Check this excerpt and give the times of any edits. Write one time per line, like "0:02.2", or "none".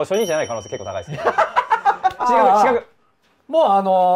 0:02.3